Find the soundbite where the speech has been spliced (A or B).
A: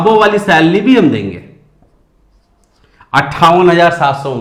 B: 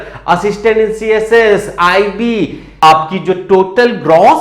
B